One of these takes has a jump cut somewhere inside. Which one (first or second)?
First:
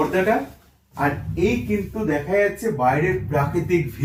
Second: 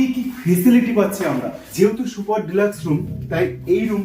second